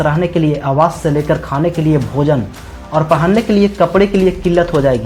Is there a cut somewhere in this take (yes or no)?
no